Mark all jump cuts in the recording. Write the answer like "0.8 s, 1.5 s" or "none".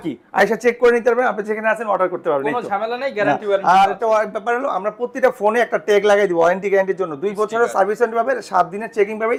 none